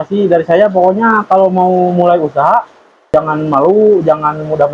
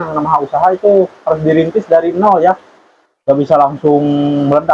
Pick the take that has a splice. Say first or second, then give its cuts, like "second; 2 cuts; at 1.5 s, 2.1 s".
first; 1 cut; at 3.1 s